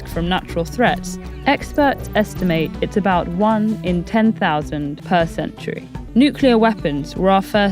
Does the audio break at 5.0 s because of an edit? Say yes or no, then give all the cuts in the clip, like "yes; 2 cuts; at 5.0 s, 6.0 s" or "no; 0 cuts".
yes; 2 cuts; at 5.0 s, 5.9 s